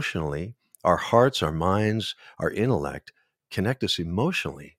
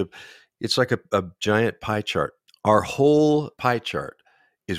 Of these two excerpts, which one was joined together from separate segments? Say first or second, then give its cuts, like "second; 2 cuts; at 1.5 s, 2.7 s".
second; 2 cuts; at 2.4 s, 3.5 s